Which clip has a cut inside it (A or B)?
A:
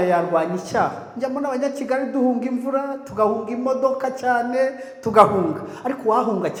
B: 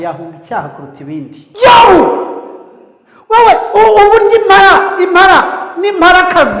B